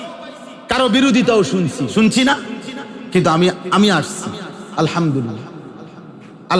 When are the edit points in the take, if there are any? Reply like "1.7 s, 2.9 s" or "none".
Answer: none